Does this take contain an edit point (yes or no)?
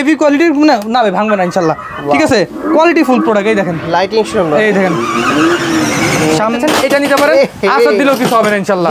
yes